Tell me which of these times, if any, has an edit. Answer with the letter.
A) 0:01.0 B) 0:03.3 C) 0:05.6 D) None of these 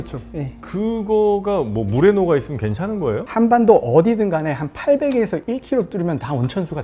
B